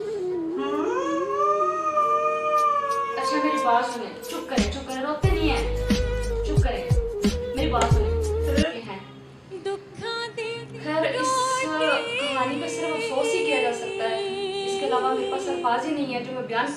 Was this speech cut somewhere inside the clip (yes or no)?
yes